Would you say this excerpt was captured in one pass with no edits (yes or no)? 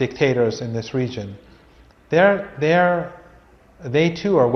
yes